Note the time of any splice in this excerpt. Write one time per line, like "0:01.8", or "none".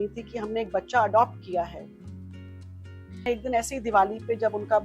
0:03.2